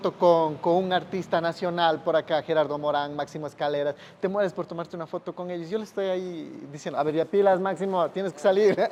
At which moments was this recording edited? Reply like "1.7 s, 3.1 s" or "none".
none